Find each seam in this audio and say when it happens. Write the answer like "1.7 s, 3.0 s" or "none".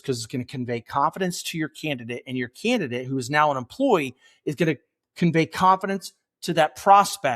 none